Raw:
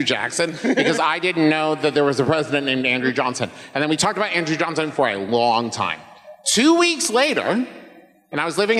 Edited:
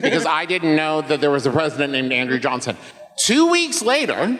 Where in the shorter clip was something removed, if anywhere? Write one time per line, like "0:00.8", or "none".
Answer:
0:02.8